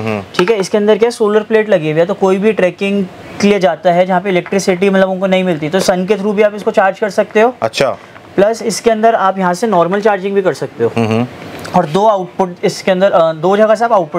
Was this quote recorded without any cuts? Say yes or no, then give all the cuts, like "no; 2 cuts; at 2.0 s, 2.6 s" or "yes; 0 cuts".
yes; 0 cuts